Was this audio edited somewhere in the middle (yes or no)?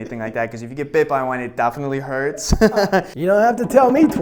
yes